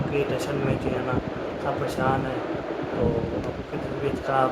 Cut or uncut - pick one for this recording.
uncut